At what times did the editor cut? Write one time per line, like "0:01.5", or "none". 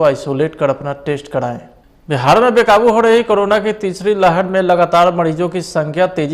0:02.0